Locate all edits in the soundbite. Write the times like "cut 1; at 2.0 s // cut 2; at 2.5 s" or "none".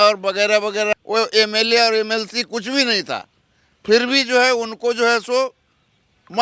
cut 1; at 0.9 s